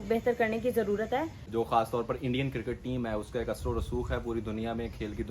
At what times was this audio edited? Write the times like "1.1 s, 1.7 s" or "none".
1.4 s